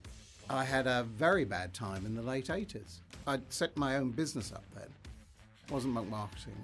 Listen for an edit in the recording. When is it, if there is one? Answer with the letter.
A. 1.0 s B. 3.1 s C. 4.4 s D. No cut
B